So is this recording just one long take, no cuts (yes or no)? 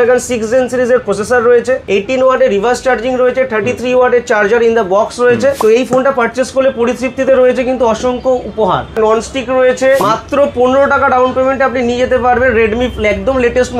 no